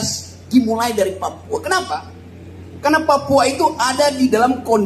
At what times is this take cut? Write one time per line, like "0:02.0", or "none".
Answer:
none